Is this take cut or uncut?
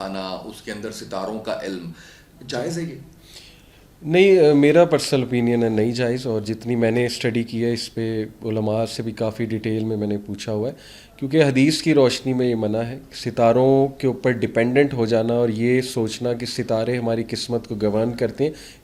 uncut